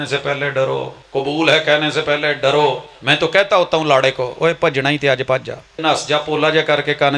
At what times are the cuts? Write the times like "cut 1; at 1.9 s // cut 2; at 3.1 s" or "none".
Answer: cut 1; at 1.0 s // cut 2; at 2.9 s // cut 3; at 5.8 s